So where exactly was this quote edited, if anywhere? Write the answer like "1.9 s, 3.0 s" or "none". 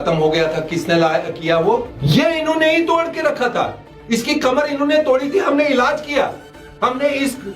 1.9 s